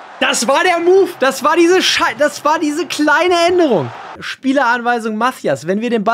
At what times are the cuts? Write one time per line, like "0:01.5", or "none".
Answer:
0:04.2